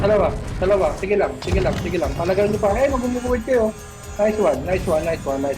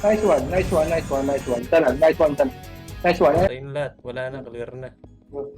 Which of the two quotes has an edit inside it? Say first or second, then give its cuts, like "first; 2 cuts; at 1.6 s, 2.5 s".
second; 1 cut; at 3.5 s